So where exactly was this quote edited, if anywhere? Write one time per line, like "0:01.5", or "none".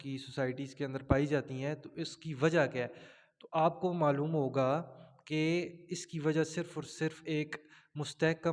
none